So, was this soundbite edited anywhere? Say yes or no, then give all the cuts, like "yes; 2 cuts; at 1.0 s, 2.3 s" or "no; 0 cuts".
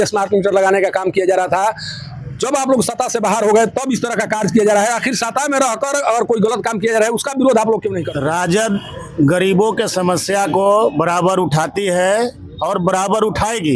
yes; 1 cut; at 8.0 s